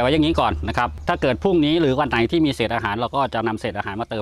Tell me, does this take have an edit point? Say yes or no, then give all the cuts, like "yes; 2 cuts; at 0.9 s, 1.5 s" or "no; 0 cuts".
yes; 1 cut; at 1.0 s